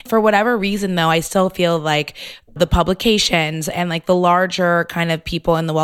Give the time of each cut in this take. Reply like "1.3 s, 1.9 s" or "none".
2.6 s

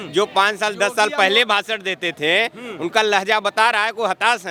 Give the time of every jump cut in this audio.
none

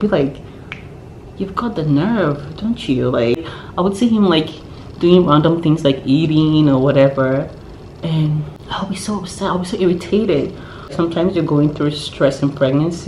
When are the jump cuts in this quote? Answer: 3.6 s, 8.6 s

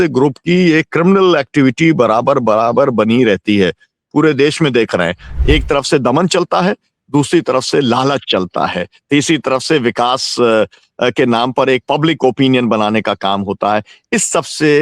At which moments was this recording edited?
5.3 s

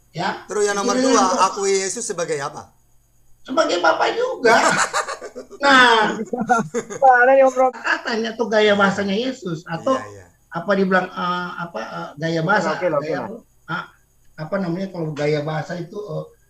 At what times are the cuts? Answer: 7.7 s

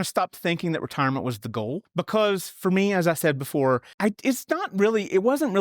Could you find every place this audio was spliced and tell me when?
1.9 s, 3.9 s

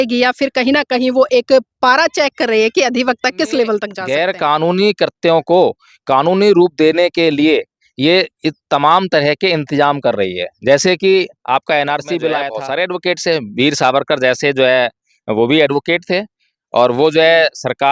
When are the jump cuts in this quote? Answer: 3.9 s, 12.6 s

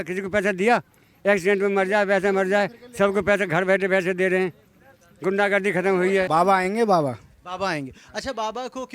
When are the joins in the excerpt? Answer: 6.3 s

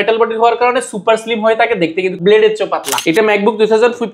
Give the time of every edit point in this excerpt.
2.1 s, 2.9 s

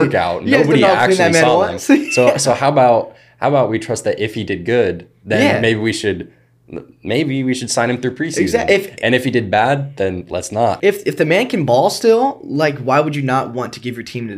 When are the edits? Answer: 10.8 s

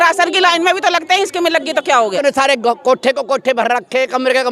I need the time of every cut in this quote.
2.2 s

